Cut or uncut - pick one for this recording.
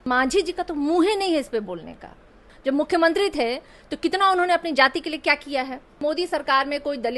cut